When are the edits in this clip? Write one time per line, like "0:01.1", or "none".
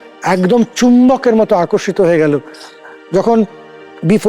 none